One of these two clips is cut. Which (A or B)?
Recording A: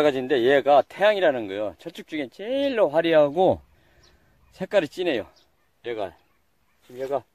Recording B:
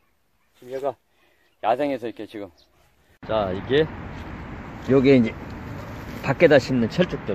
B